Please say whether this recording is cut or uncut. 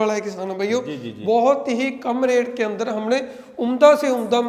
uncut